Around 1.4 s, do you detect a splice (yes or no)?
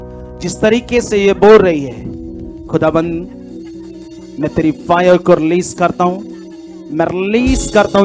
no